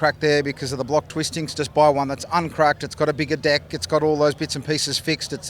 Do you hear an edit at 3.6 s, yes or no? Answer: no